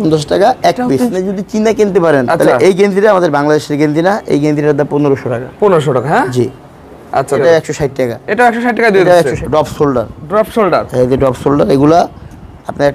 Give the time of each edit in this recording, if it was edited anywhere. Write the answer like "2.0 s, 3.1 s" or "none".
1.1 s, 7.4 s, 9.4 s